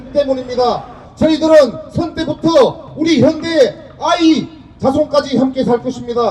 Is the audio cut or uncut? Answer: cut